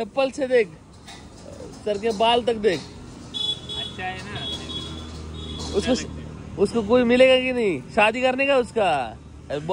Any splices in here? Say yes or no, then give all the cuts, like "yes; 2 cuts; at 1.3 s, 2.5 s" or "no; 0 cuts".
no; 0 cuts